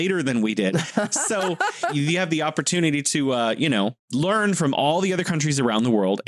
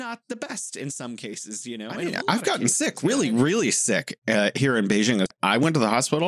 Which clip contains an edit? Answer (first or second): second